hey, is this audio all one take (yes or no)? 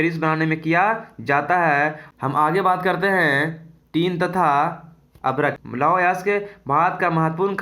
no